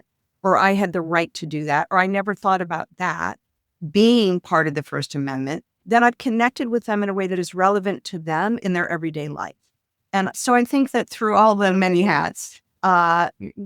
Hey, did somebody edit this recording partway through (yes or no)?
yes